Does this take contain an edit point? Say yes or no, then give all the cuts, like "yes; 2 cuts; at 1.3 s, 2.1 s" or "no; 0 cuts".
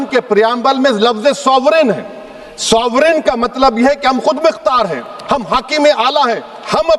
no; 0 cuts